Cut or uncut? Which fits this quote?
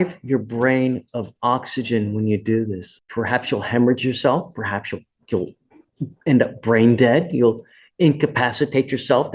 cut